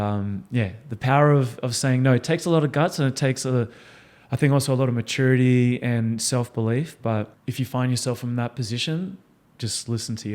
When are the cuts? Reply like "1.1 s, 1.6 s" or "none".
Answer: 7.4 s